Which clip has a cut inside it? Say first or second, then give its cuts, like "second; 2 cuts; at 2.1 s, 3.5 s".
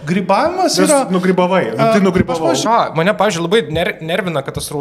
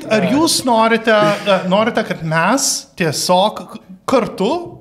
first; 1 cut; at 2.6 s